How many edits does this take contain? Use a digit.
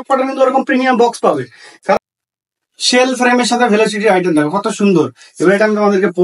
1